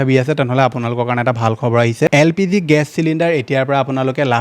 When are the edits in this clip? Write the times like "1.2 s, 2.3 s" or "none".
2.1 s